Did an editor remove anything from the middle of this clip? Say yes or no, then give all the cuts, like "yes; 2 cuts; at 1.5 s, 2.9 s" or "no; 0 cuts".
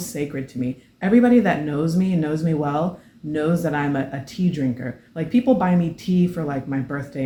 no; 0 cuts